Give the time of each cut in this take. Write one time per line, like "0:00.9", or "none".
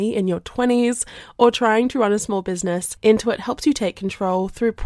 0:02.9